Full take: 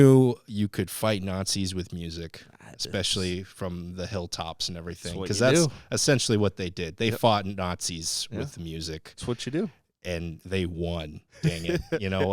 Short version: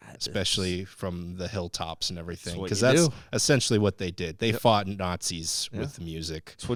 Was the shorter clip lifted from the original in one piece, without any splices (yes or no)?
yes